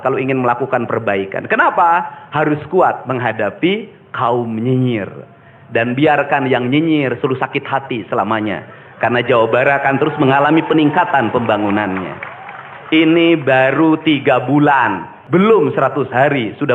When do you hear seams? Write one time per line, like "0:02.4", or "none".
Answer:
0:15.2